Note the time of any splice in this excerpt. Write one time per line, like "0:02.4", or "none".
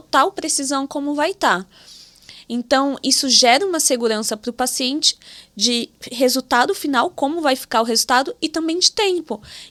none